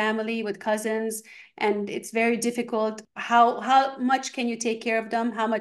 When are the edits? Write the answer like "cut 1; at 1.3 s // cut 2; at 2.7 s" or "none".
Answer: cut 1; at 3.1 s